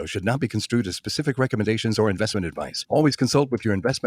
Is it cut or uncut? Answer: uncut